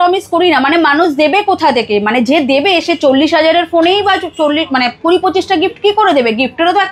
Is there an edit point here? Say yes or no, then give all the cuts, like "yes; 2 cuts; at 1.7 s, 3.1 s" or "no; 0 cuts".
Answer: no; 0 cuts